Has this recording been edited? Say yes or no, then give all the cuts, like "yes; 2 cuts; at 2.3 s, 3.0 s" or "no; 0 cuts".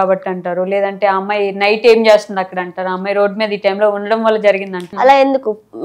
yes; 1 cut; at 4.8 s